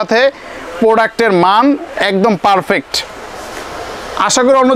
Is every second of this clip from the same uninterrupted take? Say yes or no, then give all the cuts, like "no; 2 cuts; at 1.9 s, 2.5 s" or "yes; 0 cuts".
yes; 0 cuts